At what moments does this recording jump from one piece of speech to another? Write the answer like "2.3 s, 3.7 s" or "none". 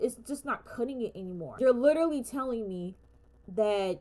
1.5 s